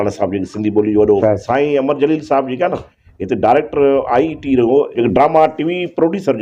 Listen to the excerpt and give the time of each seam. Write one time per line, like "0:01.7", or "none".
0:01.2
0:04.9